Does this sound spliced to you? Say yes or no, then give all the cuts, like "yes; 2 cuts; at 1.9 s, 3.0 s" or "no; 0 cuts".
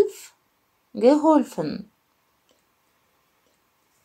no; 0 cuts